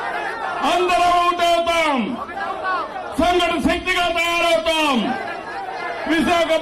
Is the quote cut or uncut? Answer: uncut